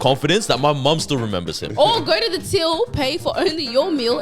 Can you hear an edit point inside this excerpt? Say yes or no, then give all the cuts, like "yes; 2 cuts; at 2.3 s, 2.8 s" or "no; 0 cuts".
yes; 1 cut; at 1.6 s